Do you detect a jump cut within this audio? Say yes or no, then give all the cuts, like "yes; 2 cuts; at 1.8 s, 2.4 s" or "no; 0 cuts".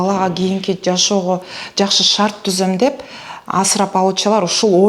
no; 0 cuts